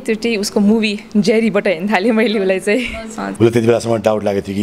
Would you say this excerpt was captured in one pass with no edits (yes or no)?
no